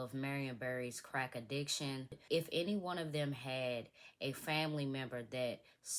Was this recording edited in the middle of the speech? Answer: yes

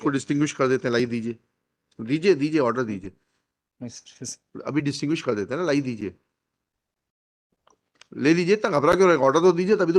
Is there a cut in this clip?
no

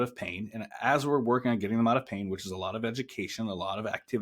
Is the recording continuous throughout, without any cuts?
yes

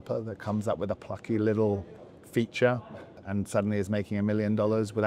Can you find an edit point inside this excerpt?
yes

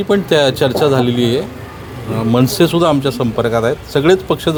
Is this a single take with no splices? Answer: yes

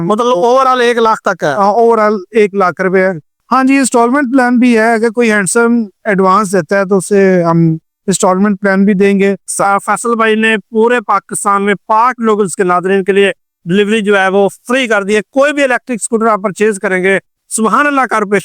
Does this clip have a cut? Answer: yes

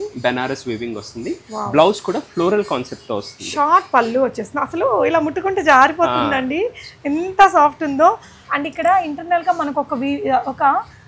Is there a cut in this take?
no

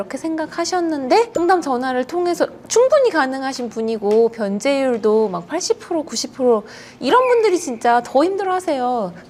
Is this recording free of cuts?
yes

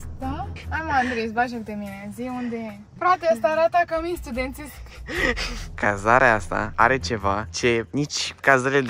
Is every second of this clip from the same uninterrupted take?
no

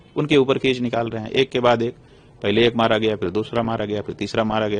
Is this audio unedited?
yes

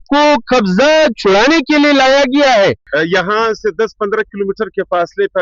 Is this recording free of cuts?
no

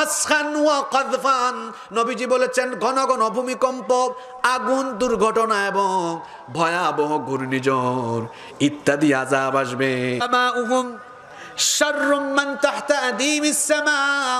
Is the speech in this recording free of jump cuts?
no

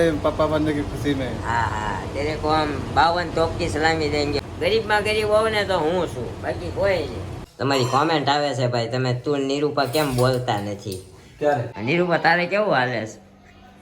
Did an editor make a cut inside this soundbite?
yes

